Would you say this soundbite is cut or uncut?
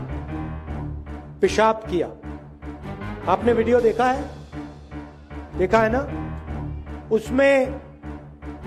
uncut